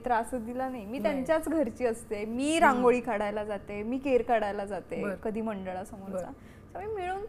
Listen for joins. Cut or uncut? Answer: uncut